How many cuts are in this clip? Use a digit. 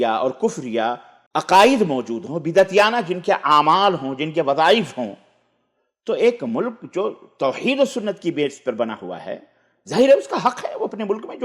1